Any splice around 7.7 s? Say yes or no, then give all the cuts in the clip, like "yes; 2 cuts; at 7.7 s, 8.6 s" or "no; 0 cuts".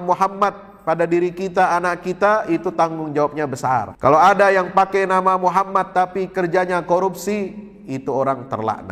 no; 1 cut; at 3.9 s